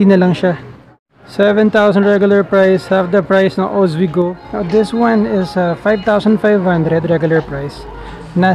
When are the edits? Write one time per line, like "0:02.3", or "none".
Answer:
0:01.1
0:04.4